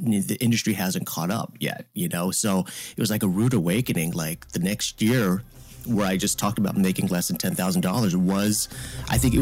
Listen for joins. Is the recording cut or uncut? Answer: uncut